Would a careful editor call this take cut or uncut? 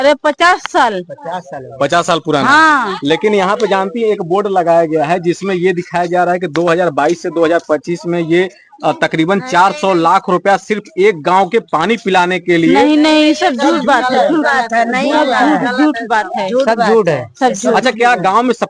uncut